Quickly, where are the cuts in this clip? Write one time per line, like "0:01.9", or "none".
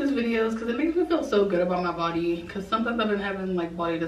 none